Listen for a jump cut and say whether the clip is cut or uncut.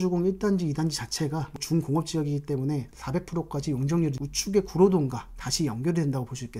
cut